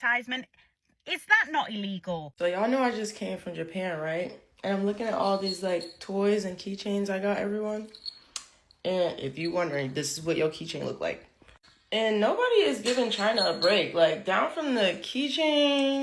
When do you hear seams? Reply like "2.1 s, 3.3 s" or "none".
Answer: 2.3 s